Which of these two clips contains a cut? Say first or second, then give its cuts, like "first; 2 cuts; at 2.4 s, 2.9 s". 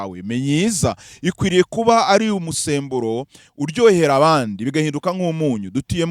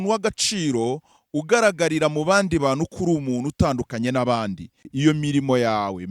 second; 1 cut; at 4.9 s